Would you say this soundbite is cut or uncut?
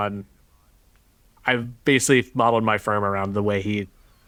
uncut